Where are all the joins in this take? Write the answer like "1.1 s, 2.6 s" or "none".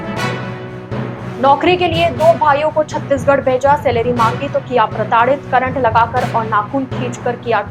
none